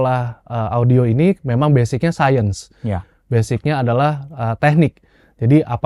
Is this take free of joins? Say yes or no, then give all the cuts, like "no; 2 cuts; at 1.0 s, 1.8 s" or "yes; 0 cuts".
yes; 0 cuts